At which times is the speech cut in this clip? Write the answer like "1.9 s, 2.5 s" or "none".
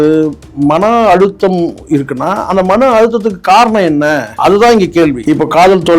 4.3 s, 5.2 s